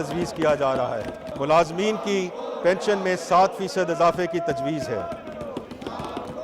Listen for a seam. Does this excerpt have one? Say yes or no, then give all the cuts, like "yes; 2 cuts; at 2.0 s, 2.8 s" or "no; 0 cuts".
yes; 1 cut; at 1.3 s